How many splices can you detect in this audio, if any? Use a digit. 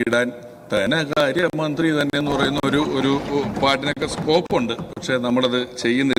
0